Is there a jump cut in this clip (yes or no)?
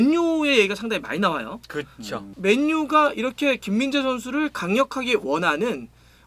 yes